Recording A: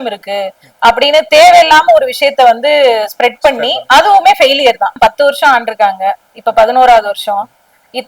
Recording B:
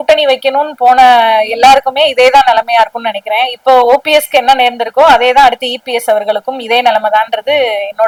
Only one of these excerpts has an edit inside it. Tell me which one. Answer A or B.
A